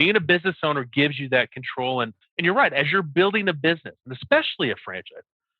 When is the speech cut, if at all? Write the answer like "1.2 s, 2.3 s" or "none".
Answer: 2.2 s

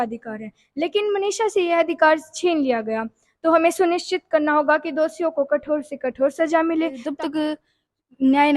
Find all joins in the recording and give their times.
7.0 s

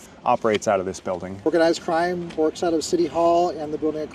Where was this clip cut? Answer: 1.4 s

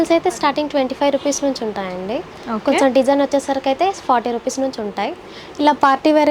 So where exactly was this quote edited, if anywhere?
none

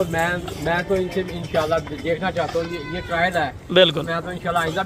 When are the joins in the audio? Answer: none

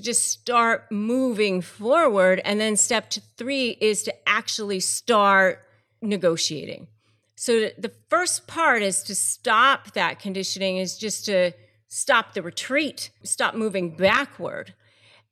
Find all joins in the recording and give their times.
none

